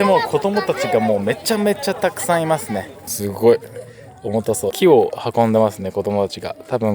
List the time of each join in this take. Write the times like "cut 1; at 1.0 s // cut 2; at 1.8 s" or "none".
cut 1; at 2.9 s // cut 2; at 4.7 s